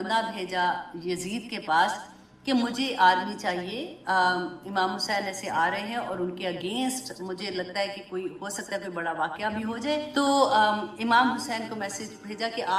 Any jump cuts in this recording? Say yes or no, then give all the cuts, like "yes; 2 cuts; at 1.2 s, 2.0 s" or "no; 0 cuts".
yes; 1 cut; at 10.1 s